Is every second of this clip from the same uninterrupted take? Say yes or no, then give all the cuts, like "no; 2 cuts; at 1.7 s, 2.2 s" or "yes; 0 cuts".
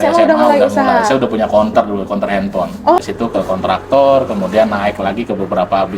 no; 1 cut; at 3.0 s